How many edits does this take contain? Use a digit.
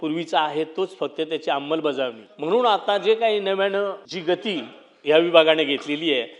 2